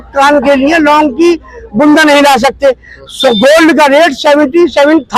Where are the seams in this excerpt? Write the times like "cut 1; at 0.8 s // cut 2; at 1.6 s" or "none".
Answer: none